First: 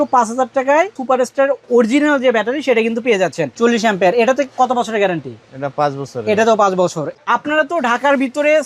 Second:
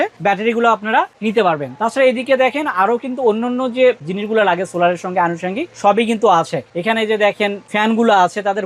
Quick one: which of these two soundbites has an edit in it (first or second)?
first